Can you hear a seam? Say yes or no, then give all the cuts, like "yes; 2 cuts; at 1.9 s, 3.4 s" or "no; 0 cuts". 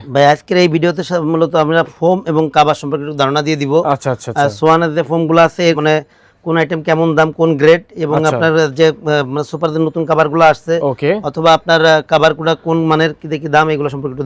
no; 0 cuts